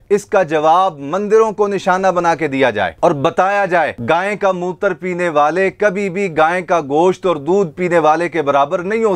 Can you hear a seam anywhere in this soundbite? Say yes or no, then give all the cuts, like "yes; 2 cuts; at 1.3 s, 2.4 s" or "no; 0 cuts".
no; 0 cuts